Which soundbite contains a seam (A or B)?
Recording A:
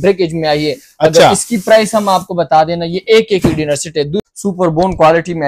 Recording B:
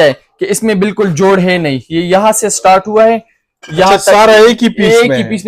A